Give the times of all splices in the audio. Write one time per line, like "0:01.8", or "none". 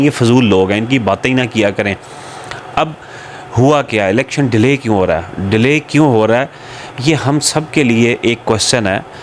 none